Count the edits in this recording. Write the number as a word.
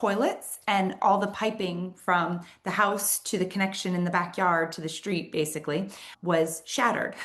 one